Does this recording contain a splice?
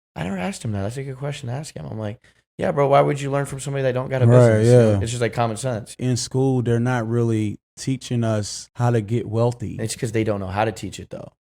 yes; 3 cuts; at 5.9 s, 8.6 s, 9.8 s

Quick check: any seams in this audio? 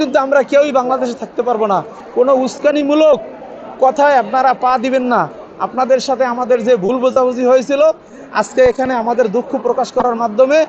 no; 0 cuts

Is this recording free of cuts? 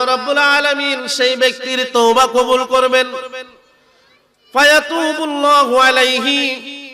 yes; 0 cuts

